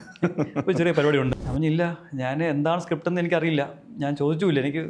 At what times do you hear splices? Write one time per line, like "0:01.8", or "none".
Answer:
0:01.3